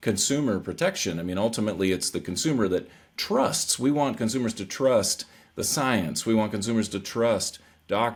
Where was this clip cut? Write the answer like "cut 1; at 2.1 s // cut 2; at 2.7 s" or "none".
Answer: none